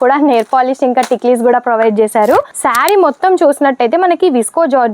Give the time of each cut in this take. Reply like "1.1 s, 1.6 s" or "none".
2.6 s